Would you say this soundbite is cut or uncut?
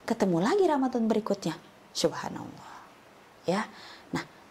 uncut